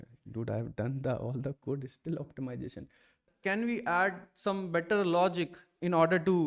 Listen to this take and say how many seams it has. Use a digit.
1